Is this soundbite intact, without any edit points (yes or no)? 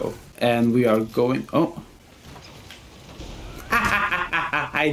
no